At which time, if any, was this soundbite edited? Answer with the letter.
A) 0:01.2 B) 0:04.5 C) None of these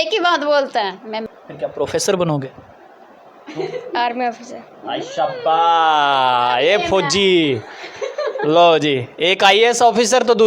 A